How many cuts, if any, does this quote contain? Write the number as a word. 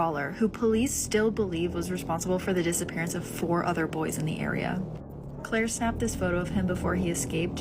one